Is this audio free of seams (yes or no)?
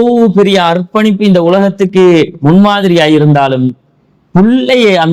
yes